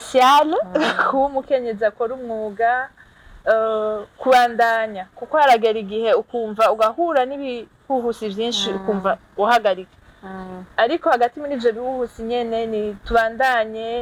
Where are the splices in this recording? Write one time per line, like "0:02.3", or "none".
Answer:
none